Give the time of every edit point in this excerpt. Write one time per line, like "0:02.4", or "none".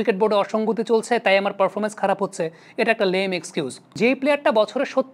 0:04.0